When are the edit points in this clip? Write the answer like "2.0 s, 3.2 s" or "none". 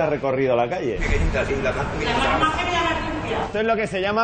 1.0 s